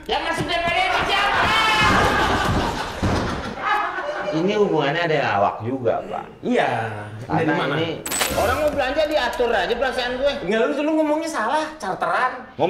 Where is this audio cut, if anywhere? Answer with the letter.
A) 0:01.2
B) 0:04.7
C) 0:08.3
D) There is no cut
C